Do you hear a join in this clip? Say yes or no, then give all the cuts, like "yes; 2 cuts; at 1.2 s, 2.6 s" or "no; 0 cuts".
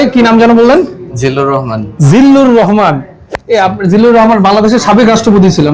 no; 0 cuts